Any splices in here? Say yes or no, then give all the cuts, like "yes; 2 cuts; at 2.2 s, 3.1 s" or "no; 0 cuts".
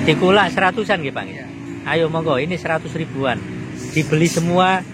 no; 0 cuts